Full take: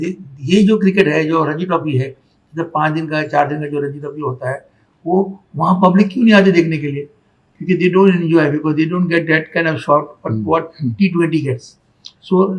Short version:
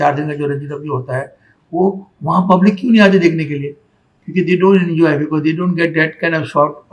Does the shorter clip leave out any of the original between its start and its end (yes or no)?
no